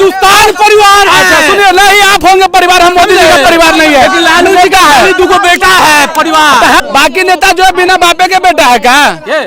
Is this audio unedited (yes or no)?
no